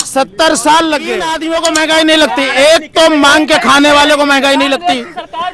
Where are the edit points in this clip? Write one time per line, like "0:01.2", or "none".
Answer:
0:01.3

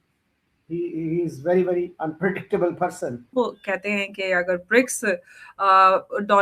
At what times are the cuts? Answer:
0:03.3

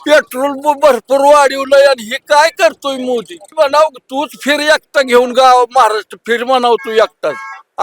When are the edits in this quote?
0:03.4

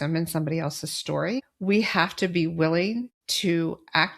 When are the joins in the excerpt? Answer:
0:01.5
0:03.2

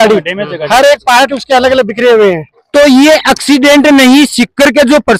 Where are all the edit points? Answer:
0:02.5

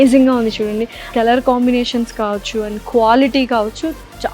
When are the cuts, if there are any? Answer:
0:01.1

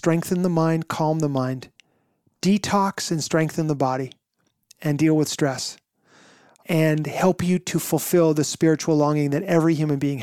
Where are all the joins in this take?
0:06.6

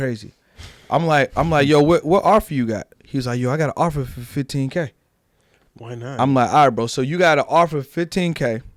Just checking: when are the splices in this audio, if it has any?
none

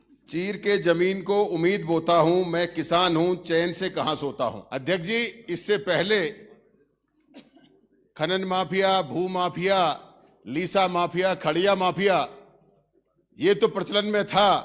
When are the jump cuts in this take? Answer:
0:04.6

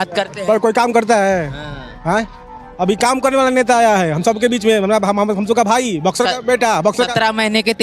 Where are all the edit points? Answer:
none

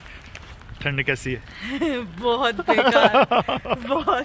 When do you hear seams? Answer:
none

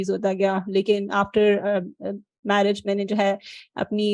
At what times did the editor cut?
none

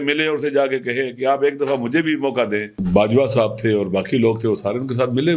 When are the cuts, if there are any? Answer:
0:02.7

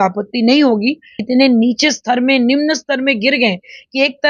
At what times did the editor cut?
0:01.2

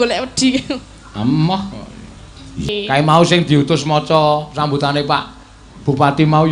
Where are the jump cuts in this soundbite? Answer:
0:02.7

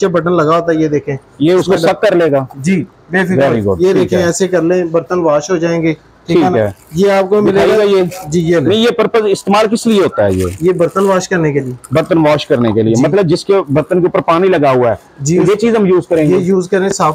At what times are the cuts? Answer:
none

